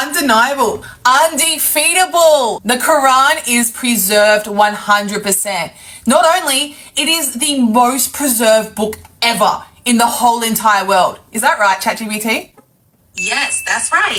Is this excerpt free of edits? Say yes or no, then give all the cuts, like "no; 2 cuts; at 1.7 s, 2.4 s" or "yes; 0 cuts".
yes; 0 cuts